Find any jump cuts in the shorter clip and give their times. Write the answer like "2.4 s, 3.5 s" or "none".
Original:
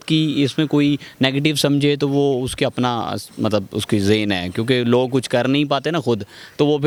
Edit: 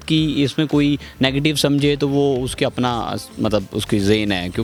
none